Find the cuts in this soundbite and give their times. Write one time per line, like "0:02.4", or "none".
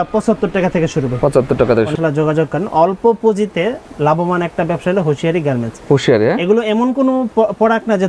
0:01.9